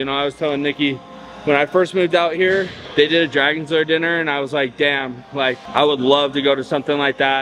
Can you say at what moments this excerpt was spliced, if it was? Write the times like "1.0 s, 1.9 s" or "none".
none